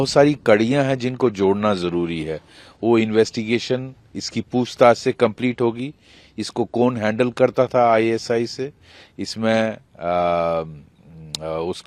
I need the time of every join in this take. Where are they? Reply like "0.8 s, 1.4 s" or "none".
none